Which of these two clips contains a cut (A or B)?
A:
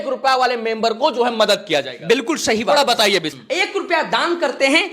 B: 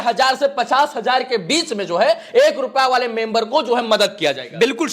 A